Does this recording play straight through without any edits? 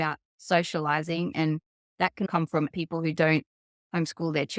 no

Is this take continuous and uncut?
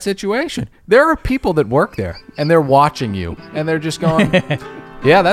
yes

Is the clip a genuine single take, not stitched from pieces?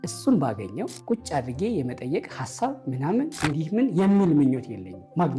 no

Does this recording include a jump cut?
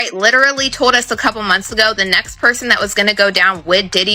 no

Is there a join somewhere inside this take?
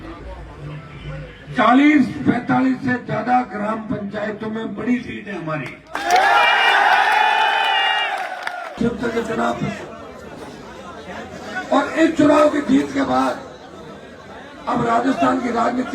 yes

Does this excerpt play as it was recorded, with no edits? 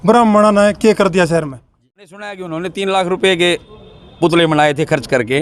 no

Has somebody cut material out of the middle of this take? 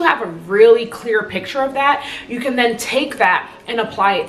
no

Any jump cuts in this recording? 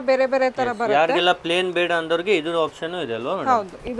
no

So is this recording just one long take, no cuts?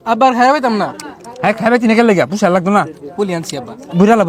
yes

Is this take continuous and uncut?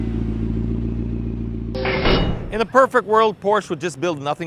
yes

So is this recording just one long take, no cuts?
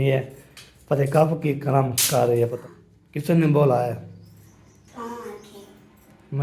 no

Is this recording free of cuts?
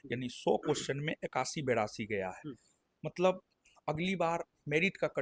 yes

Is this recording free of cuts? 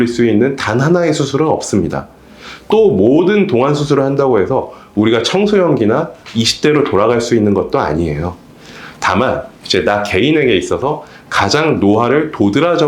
yes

